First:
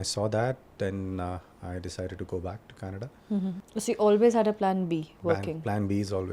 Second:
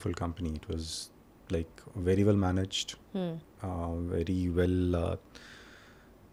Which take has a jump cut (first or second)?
first